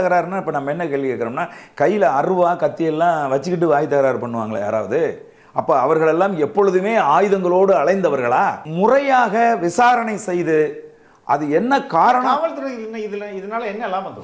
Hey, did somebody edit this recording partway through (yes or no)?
yes